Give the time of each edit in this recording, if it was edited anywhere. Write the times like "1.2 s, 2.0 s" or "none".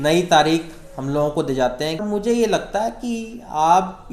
2.0 s